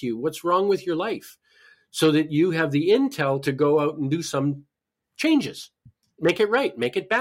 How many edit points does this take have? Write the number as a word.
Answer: one